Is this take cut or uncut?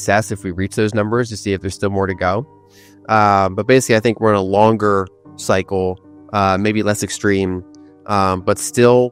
uncut